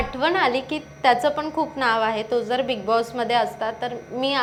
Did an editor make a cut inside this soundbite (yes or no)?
no